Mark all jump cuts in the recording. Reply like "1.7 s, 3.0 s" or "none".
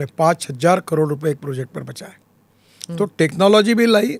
none